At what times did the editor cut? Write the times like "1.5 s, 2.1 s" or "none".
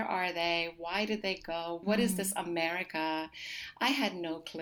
1.8 s